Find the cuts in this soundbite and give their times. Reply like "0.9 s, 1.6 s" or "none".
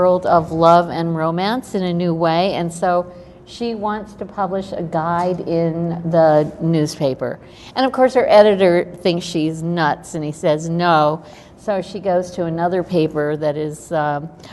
3.0 s